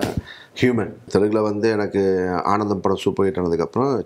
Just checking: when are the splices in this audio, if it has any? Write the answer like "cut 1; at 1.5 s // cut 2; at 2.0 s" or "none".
cut 1; at 1.0 s